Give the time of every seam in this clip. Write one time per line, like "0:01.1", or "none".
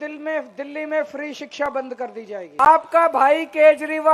0:02.6